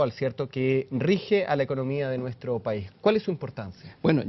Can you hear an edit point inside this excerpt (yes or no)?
yes